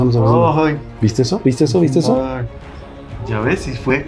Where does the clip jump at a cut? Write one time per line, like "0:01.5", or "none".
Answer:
0:02.7